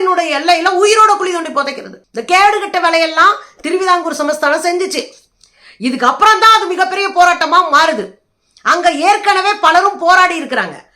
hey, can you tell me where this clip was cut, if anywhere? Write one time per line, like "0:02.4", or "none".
none